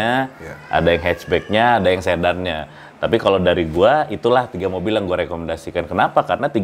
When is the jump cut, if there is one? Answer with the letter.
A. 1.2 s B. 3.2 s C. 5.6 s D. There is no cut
D